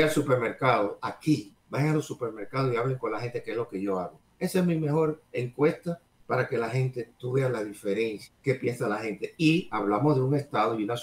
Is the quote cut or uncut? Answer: cut